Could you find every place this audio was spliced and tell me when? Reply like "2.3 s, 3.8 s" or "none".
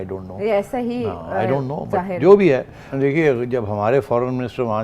2.8 s